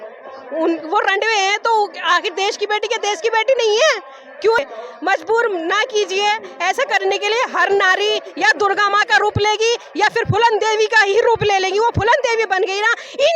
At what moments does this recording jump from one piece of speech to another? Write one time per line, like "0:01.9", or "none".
0:04.6